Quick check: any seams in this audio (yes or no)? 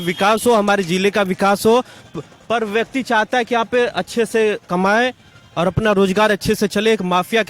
no